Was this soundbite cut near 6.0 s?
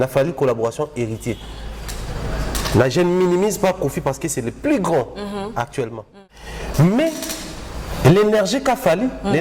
yes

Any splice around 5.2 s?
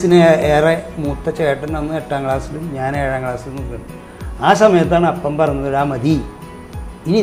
no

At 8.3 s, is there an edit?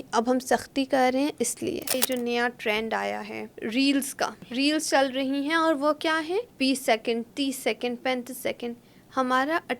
no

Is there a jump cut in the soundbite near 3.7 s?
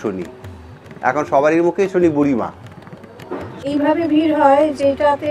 yes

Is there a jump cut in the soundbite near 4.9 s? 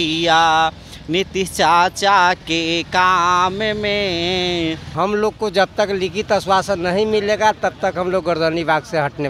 yes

